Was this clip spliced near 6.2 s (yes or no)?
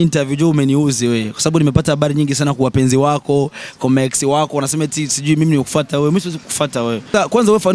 no